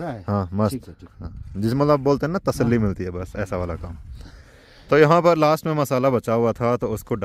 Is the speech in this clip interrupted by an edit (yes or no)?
no